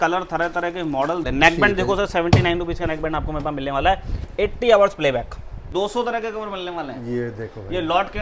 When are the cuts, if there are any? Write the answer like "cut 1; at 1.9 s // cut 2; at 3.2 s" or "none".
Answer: cut 1; at 1.2 s // cut 2; at 5.7 s